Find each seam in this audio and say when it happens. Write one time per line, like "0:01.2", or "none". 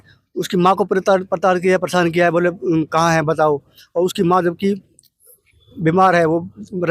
none